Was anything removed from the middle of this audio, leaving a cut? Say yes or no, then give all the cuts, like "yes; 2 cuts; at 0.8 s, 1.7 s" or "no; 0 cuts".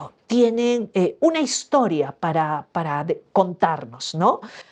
no; 0 cuts